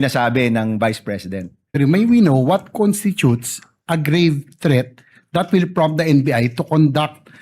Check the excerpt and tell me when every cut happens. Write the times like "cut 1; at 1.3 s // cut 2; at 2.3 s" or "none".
cut 1; at 1.7 s